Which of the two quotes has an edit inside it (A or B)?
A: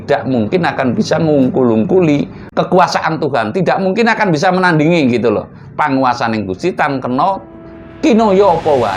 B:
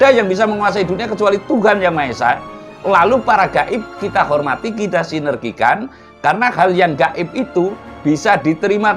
A